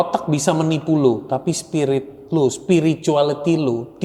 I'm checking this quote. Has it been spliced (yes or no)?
no